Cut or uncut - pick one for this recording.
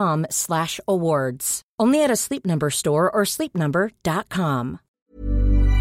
cut